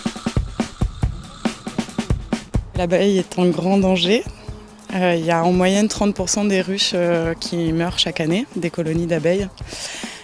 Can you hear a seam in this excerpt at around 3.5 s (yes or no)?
yes